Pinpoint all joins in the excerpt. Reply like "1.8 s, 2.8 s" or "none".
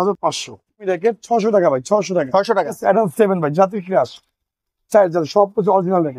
0.8 s, 2.8 s